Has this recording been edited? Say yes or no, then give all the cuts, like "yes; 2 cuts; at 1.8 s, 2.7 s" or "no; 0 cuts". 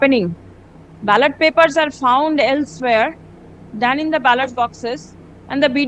no; 0 cuts